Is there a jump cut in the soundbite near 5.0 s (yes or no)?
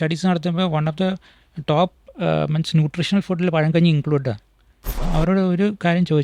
yes